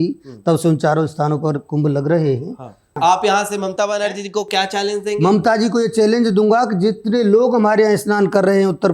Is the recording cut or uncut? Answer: cut